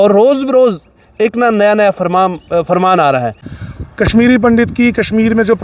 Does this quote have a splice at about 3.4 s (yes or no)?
yes